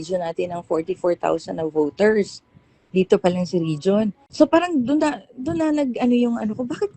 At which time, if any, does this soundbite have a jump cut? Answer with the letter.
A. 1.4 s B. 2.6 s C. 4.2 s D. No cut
C